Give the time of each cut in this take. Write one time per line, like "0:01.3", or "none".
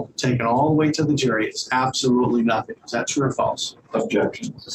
none